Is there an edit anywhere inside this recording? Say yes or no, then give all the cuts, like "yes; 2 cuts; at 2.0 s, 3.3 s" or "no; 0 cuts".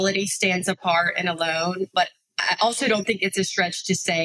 no; 0 cuts